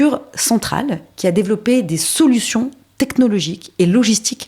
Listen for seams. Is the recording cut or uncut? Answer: uncut